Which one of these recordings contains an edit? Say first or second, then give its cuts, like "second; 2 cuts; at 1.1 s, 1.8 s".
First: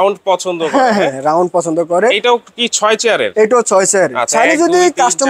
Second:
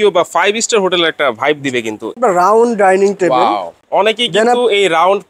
second; 2 cuts; at 2.2 s, 3.7 s